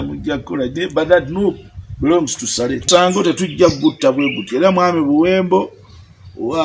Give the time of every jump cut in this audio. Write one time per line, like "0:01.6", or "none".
0:02.8